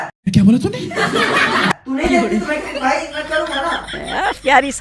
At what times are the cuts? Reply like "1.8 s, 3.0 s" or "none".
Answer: none